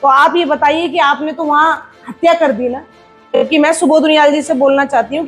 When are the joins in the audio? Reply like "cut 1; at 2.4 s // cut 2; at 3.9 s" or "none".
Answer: cut 1; at 3.2 s